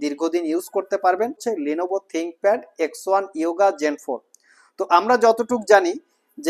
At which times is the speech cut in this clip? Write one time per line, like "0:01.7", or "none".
0:01.4